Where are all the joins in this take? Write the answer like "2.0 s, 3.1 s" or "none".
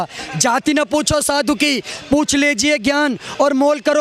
none